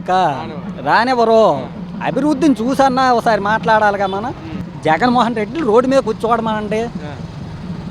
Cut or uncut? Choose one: cut